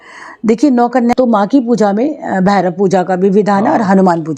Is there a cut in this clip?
yes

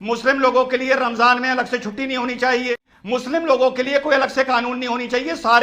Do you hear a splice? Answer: yes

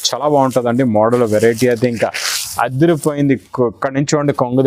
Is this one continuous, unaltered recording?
yes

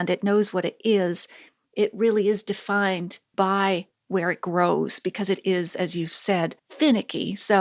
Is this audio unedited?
yes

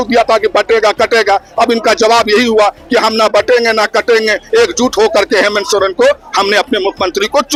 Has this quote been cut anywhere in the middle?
no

